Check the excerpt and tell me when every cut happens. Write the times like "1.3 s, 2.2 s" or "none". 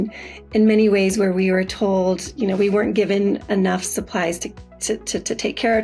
none